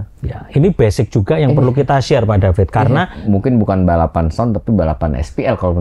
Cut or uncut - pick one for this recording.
cut